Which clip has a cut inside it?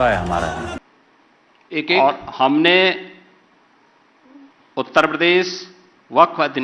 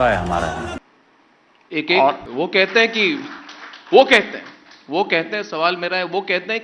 second; 1 cut; at 2.2 s

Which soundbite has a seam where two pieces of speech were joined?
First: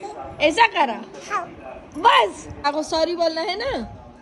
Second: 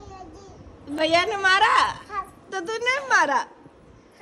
first; 1 cut; at 2.6 s

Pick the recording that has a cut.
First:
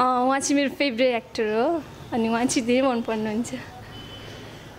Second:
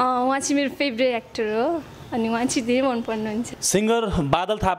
second; 1 cut; at 3.6 s

